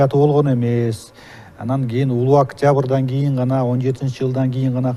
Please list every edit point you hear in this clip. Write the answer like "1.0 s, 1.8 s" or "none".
none